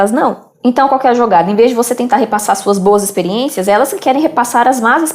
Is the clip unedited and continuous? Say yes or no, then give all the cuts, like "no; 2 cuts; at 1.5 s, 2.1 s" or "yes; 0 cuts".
yes; 0 cuts